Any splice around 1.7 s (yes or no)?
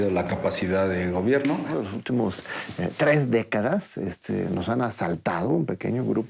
yes